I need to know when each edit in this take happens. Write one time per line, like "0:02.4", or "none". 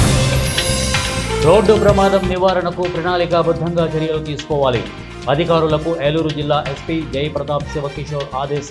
none

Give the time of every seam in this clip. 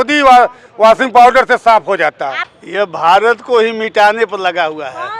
0:02.3

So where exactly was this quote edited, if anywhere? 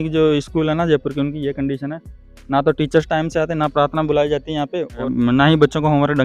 0:05.0

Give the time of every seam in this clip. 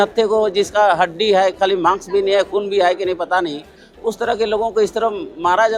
none

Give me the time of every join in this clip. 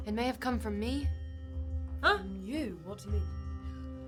none

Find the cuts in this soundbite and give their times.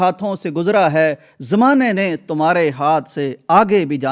none

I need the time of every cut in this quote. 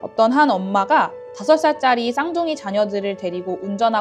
none

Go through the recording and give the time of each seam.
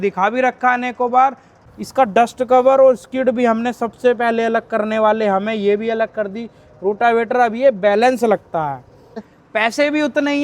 0:01.5
0:09.3

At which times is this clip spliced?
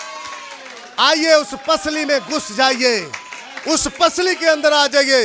none

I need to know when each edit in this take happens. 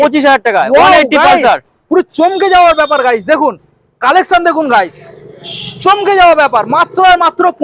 none

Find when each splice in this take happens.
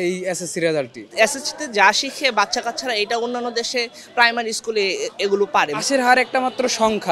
0:01.0
0:05.8

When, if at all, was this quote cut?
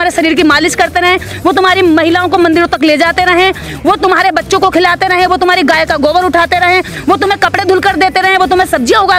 none

